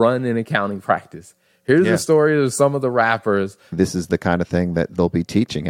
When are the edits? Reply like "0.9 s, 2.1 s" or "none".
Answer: 3.7 s